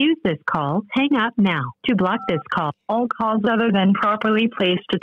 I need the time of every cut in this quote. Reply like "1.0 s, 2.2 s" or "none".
2.7 s

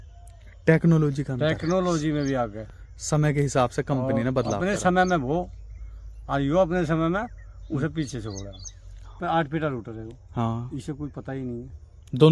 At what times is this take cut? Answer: 9.2 s

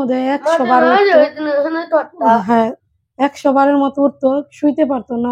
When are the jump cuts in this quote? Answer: none

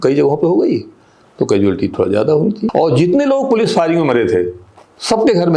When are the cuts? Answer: 2.7 s

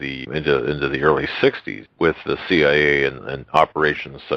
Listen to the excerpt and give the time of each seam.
3.0 s

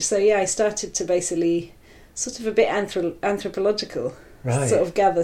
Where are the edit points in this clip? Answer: none

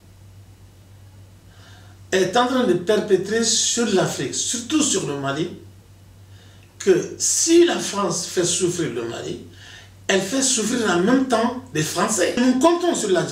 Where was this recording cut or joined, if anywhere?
12.4 s

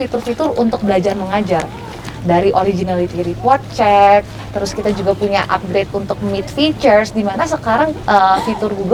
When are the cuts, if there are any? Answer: none

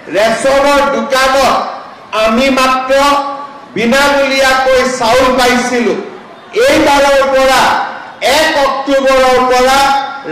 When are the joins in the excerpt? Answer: none

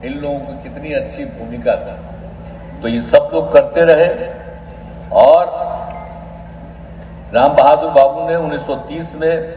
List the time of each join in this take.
none

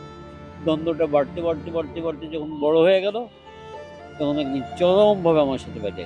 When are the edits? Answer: none

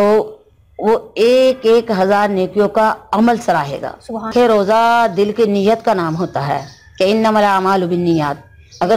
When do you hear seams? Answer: 4.3 s

